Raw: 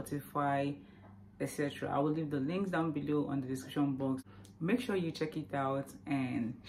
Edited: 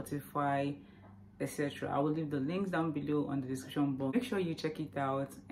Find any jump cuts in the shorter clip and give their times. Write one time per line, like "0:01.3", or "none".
0:04.1